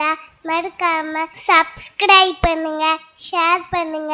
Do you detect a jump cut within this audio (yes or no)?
yes